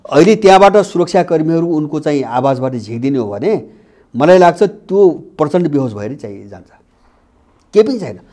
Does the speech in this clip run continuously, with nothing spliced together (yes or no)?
yes